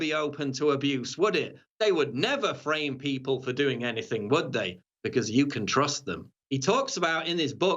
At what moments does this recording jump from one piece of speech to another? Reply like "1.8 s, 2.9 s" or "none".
6.4 s